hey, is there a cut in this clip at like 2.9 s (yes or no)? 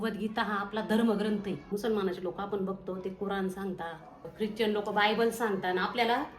no